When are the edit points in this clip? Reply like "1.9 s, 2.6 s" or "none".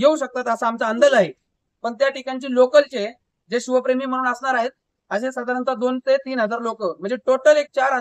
none